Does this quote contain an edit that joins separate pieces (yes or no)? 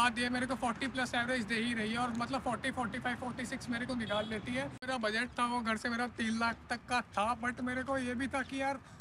yes